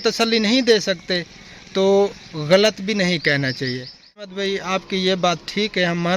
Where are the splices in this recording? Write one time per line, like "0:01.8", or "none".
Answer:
0:04.3